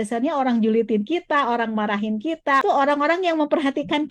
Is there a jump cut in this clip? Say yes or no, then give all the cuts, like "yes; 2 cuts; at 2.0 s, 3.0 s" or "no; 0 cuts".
yes; 1 cut; at 2.6 s